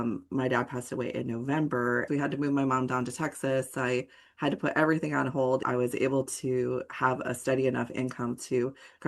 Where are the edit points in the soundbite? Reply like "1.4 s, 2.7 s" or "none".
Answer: 2.1 s, 5.6 s